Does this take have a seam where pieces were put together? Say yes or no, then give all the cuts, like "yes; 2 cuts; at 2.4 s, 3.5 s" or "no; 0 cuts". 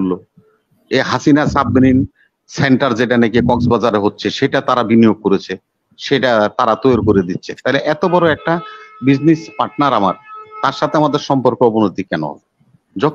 no; 0 cuts